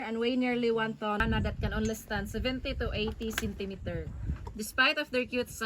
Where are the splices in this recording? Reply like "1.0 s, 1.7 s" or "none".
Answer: 1.2 s